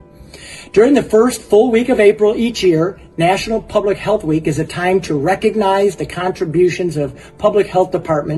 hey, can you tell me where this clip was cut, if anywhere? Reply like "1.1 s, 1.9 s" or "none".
none